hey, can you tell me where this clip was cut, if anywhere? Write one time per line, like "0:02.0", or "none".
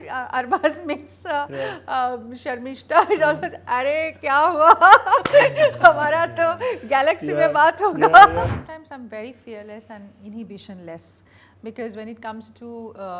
0:08.5